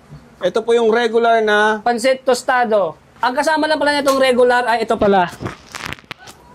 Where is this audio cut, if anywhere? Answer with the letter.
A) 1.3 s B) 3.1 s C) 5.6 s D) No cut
B